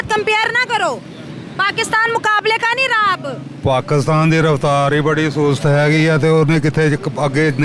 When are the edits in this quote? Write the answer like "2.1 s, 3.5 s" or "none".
none